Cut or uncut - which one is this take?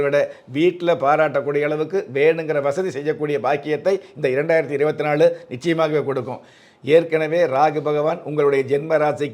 uncut